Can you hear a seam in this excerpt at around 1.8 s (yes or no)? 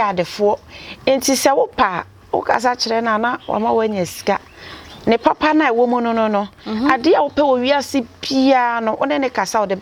no